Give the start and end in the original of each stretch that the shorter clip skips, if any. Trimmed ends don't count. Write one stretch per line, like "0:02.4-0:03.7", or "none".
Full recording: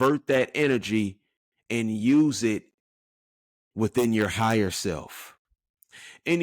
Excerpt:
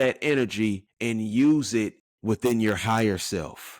0:01.2-0:01.6
0:02.7-0:03.6